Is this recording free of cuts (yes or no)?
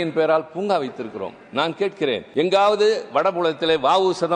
no